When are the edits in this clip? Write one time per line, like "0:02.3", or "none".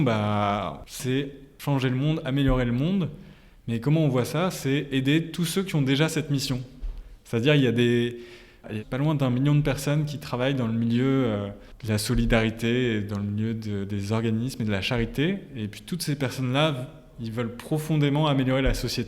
0:01.3